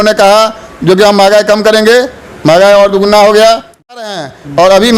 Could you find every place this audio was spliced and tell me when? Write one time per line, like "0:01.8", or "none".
0:04.0

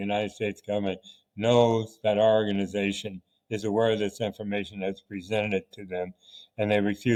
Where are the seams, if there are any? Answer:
none

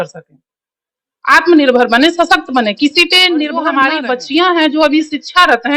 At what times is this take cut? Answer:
0:03.7

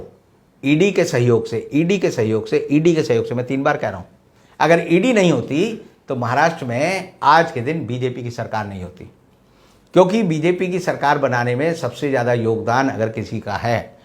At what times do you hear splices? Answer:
none

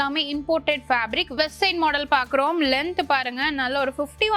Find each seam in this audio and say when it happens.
0:01.3

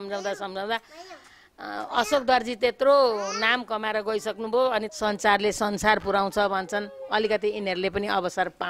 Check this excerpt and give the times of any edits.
0:04.9

